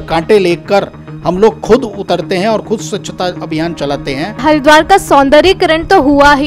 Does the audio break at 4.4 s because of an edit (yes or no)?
yes